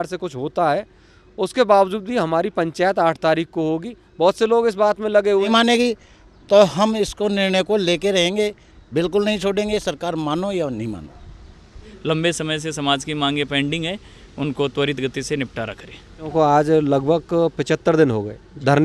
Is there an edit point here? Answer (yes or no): yes